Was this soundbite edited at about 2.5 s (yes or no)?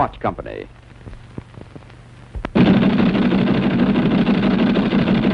no